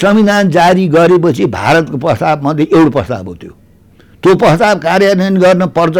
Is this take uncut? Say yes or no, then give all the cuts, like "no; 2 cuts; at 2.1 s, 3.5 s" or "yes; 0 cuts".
yes; 0 cuts